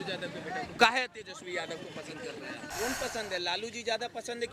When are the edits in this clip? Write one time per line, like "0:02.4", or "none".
0:02.7